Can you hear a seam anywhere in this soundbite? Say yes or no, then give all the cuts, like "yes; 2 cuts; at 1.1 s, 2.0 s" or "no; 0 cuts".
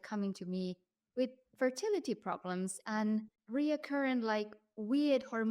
yes; 1 cut; at 3.4 s